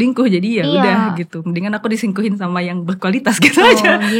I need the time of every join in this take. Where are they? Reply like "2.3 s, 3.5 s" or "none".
none